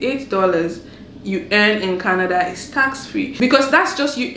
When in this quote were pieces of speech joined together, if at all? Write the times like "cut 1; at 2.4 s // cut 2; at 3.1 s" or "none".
cut 1; at 3.3 s